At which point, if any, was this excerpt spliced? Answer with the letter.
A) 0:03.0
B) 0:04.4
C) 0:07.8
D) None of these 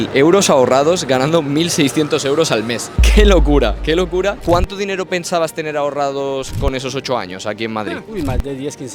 B